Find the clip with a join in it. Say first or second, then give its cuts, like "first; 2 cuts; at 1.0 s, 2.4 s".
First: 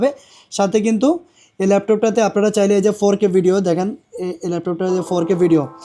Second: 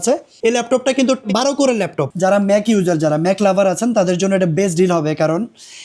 second; 1 cut; at 2.0 s